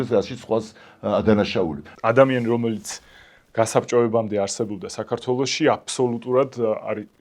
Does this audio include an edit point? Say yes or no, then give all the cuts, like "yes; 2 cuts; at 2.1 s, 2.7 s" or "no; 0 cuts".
yes; 1 cut; at 1.9 s